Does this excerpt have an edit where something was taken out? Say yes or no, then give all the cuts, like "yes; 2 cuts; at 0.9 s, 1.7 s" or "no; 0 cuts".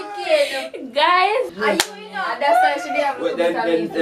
yes; 1 cut; at 1.5 s